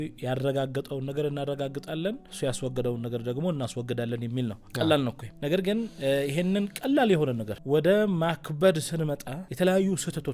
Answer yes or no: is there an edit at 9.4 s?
yes